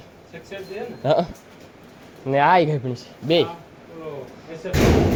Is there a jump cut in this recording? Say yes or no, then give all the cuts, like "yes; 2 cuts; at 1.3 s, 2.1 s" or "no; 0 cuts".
no; 0 cuts